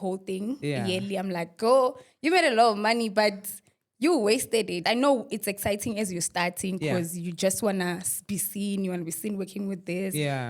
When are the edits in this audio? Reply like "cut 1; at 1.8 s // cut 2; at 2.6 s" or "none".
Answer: cut 1; at 4.8 s